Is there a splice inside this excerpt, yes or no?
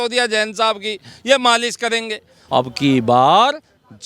yes